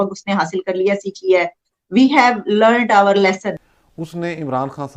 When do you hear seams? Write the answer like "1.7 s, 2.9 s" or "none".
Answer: 3.5 s